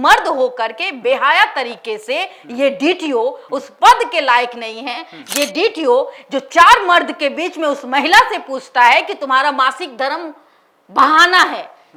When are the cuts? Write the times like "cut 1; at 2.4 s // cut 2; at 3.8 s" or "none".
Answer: none